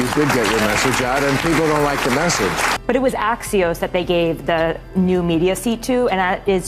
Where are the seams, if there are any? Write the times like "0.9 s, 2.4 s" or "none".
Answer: 2.7 s